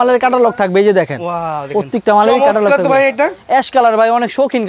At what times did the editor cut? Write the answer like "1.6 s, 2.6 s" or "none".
none

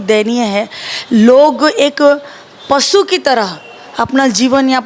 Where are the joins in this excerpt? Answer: none

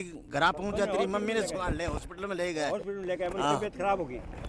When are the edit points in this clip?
none

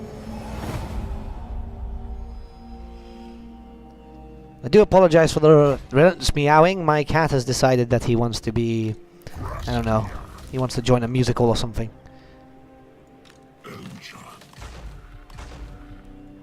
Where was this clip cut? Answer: 8.4 s

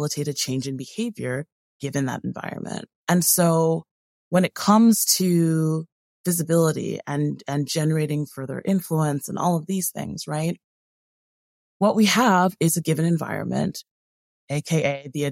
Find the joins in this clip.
2.9 s

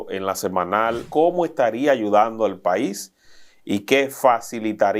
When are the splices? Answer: 1.1 s

